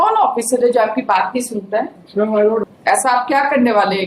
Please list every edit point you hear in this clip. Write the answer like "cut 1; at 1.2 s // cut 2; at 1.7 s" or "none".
cut 1; at 2.6 s